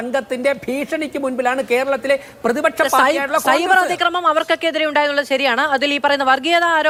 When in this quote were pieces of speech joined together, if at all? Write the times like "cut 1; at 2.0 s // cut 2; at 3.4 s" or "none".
none